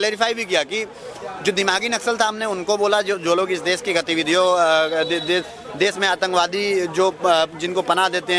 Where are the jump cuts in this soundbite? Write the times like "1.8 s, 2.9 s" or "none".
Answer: none